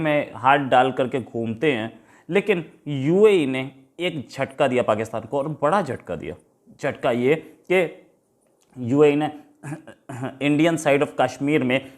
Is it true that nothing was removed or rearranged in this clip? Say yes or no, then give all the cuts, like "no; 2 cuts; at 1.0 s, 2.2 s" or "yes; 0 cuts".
yes; 0 cuts